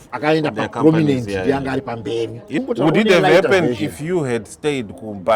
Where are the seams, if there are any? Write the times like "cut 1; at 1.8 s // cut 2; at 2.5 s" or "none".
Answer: cut 1; at 2.6 s